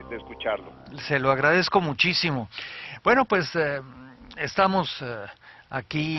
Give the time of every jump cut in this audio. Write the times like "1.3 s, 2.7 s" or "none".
3.3 s